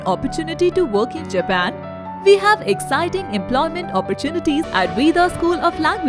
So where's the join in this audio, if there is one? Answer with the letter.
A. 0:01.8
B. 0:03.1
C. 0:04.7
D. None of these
C